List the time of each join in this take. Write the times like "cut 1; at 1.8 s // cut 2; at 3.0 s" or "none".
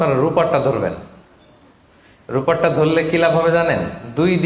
none